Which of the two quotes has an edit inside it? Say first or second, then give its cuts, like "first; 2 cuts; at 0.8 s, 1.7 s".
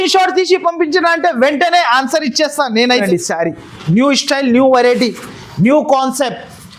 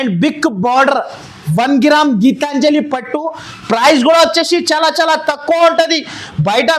first; 1 cut; at 3.0 s